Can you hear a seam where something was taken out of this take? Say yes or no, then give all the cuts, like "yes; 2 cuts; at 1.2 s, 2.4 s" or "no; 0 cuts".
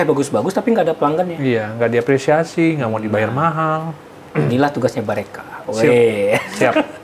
no; 0 cuts